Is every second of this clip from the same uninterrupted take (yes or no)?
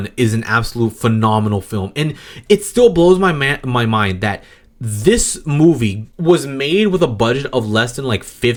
yes